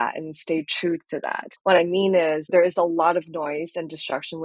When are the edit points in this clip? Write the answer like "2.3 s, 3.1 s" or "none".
1.5 s, 2.5 s